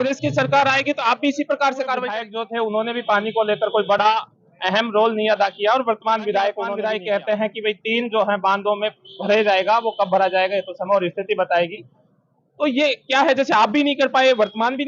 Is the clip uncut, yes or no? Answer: no